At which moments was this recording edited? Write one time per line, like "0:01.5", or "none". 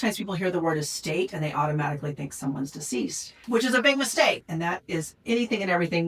0:03.4
0:04.4